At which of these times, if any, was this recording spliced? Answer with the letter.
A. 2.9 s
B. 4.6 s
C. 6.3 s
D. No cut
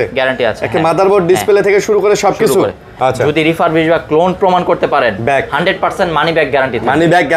A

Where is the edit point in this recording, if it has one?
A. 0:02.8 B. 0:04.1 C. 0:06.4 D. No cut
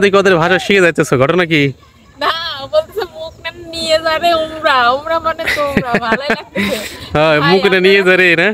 D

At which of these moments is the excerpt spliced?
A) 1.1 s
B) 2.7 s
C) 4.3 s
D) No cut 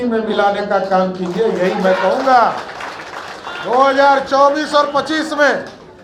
D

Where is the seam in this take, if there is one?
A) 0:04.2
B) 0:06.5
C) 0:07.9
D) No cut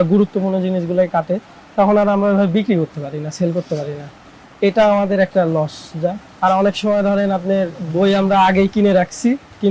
D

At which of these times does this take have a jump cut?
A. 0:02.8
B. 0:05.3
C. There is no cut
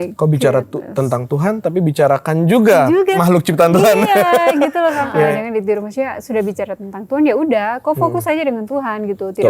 B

